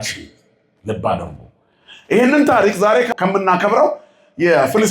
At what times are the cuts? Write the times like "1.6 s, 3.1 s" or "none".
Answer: 3.1 s